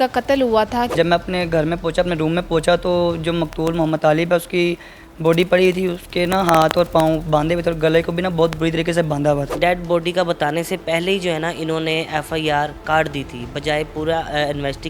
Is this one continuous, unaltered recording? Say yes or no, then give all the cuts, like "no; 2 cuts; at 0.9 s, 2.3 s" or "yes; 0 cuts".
no; 2 cuts; at 0.9 s, 9.6 s